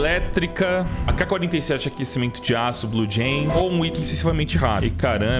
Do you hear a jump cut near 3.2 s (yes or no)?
no